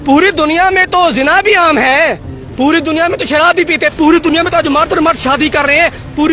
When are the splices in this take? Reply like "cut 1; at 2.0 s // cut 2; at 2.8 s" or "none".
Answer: none